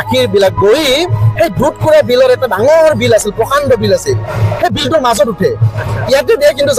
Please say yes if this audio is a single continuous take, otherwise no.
yes